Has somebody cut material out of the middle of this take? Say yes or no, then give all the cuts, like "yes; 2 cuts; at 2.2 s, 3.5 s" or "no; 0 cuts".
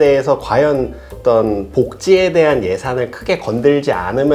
yes; 1 cut; at 1.1 s